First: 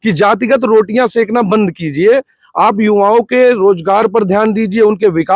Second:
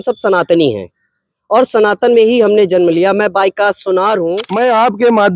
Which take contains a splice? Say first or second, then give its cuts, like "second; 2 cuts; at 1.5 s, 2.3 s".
second; 1 cut; at 4.4 s